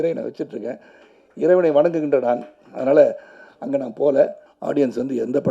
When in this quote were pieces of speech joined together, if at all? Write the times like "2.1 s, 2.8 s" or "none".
4.5 s